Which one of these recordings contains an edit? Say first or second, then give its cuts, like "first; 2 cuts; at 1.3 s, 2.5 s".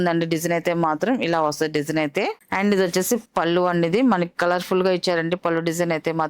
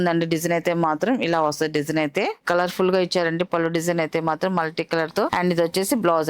second; 2 cuts; at 2.4 s, 5.3 s